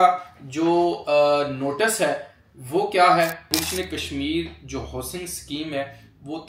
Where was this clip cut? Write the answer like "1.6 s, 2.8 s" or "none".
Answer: 3.5 s